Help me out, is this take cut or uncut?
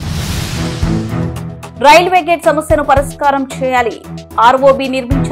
cut